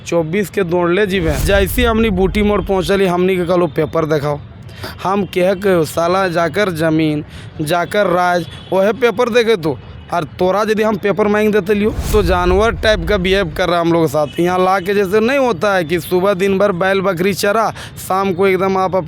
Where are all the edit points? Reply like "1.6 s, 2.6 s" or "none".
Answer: 1.4 s, 12.1 s